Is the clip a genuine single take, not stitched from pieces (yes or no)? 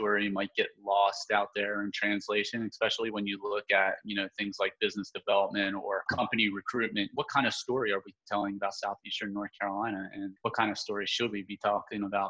no